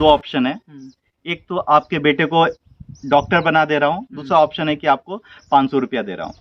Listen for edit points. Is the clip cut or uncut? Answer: uncut